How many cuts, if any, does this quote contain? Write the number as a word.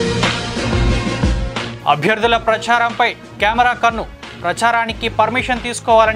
one